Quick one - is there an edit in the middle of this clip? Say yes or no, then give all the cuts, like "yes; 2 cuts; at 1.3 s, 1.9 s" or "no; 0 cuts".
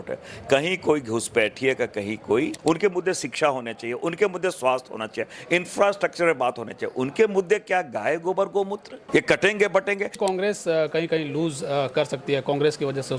yes; 3 cuts; at 2.6 s, 8.9 s, 10.2 s